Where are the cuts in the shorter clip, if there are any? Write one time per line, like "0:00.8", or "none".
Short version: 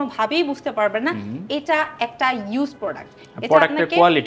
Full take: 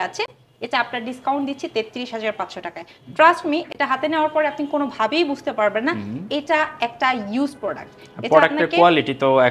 none